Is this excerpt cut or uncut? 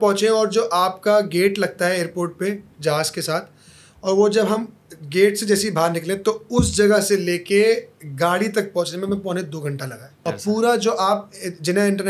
cut